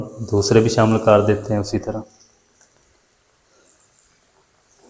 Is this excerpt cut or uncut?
uncut